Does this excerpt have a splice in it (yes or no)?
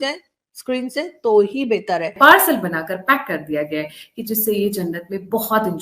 yes